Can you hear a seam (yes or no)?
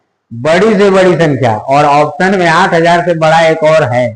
no